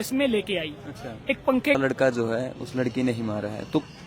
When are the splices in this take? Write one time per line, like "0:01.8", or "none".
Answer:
0:01.8